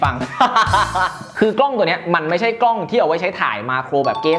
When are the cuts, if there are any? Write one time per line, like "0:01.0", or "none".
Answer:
0:01.3

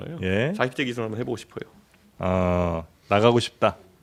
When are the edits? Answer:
none

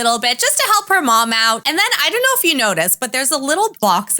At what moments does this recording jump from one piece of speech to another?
0:01.6

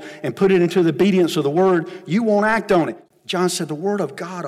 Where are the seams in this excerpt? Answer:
0:03.0

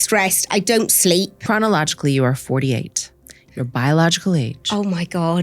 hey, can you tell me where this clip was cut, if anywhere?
0:01.4

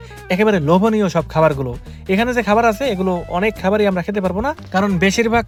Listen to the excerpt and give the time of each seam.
none

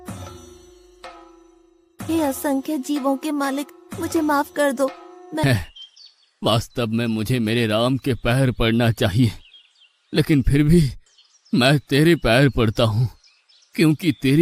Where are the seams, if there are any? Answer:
0:05.4

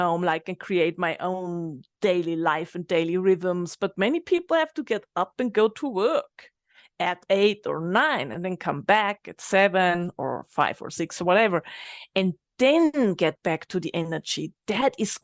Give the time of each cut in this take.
none

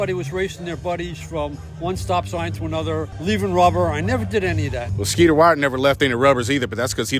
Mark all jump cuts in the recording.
0:03.1
0:04.8

